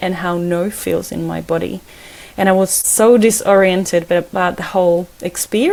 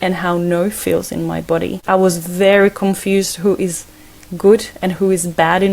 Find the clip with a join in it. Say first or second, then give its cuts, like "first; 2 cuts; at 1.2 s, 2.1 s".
second; 1 cut; at 1.7 s